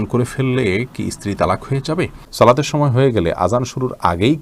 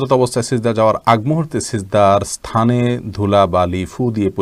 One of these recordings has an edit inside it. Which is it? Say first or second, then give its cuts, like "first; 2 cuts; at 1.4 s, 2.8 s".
first; 1 cut; at 2.2 s